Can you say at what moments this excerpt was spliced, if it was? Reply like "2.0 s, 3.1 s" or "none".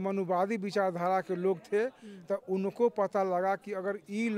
none